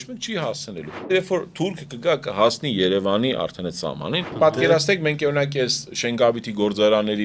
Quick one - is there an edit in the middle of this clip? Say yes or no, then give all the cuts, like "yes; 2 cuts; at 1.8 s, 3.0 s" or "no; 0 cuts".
yes; 2 cuts; at 1.1 s, 4.3 s